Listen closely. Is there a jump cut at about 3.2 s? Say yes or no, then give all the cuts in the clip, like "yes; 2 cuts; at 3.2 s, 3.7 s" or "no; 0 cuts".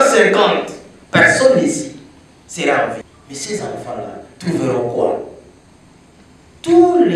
yes; 1 cut; at 3.2 s